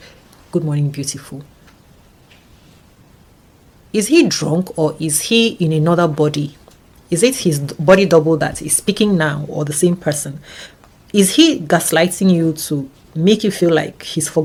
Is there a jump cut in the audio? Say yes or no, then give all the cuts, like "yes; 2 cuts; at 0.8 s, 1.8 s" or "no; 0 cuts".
no; 0 cuts